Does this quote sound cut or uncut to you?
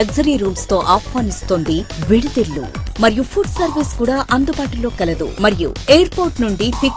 uncut